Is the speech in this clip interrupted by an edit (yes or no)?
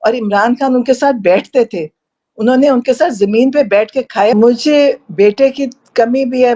yes